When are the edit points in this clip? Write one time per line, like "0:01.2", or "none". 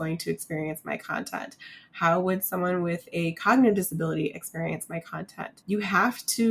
0:05.5